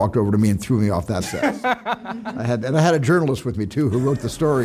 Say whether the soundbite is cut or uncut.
uncut